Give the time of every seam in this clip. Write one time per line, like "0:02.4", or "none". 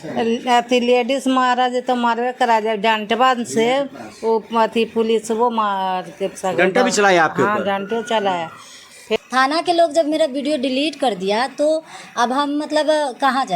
0:09.2